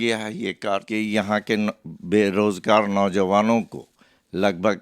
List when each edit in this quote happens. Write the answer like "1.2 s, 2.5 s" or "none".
1.1 s